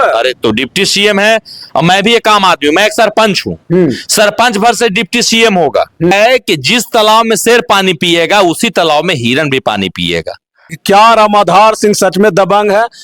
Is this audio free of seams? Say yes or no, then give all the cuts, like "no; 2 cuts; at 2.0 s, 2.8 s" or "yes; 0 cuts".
no; 2 cuts; at 6.1 s, 10.8 s